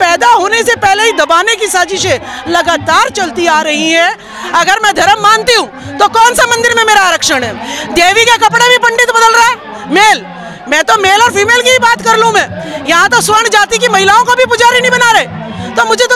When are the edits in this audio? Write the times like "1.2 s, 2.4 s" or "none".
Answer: 4.3 s